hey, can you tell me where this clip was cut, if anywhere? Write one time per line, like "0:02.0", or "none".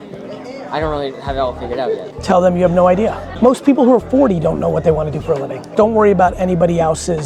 0:02.1
0:03.2
0:05.7